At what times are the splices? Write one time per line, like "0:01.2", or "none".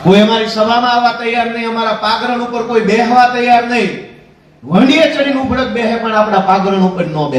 none